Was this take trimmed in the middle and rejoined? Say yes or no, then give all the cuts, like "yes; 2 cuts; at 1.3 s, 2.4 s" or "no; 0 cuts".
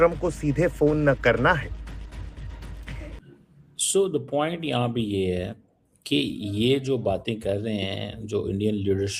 yes; 1 cut; at 3.1 s